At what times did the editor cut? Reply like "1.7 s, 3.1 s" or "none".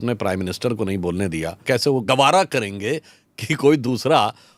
2.0 s

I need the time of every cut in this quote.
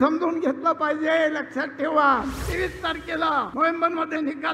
2.4 s, 3.5 s

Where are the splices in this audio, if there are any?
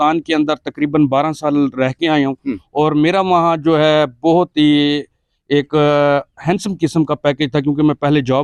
none

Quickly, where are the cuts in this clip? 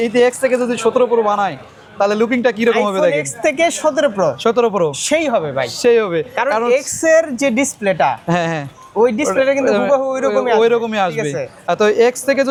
none

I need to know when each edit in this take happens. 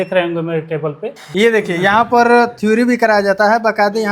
1.2 s

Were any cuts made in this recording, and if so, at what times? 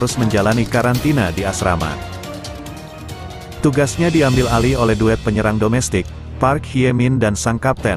1.9 s, 3.6 s

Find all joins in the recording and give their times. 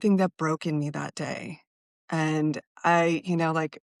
none

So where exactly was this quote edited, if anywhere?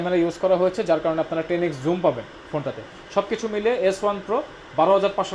none

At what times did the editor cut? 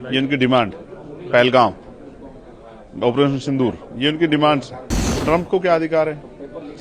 5.1 s

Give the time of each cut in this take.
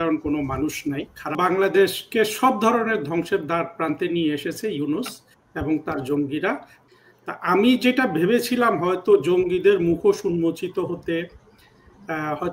1.4 s, 6.7 s

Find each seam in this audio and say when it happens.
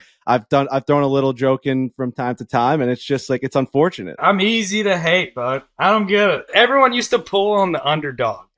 4.2 s, 6.5 s

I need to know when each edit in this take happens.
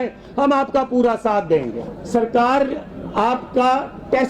1.9 s

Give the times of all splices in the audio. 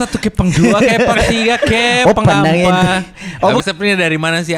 3.6 s

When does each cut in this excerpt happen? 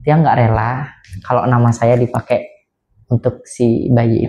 none

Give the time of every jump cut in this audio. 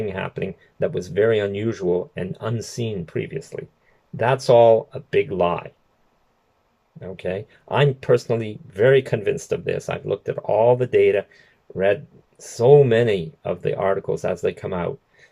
none

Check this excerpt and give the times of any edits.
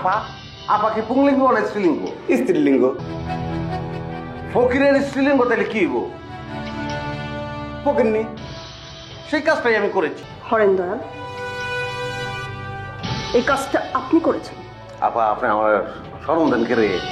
3.0 s, 10.3 s

